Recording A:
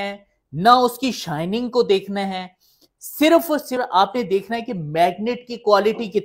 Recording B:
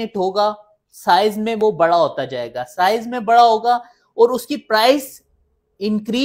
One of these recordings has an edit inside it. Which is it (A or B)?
A